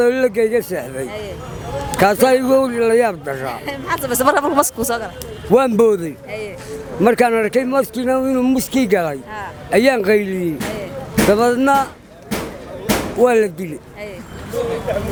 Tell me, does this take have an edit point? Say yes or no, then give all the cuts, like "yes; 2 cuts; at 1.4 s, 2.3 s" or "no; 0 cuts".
no; 0 cuts